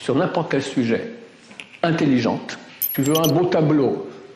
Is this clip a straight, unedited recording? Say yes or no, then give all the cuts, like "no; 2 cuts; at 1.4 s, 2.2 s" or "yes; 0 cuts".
no; 1 cut; at 2.9 s